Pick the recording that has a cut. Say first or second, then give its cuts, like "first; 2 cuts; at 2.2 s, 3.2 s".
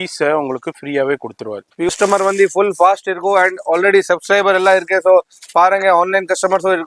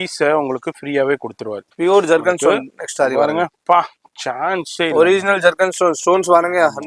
first; 1 cut; at 1.9 s